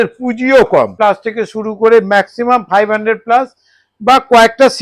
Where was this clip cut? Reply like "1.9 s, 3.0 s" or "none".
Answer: 0.9 s